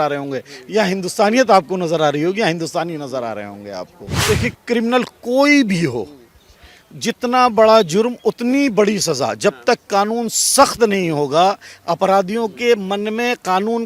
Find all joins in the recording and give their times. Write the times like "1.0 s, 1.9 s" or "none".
4.1 s